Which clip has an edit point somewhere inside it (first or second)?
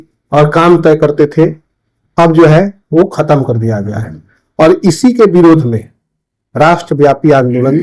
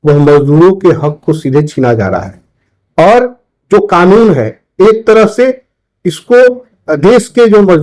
second